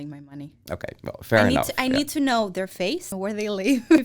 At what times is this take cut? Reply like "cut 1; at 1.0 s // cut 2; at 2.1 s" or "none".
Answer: cut 1; at 3.1 s